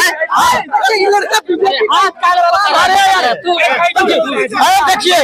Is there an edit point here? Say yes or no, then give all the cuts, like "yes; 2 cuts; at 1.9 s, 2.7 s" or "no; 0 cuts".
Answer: no; 0 cuts